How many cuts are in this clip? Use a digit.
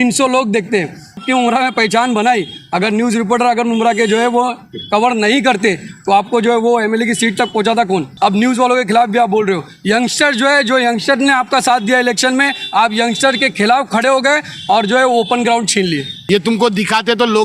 3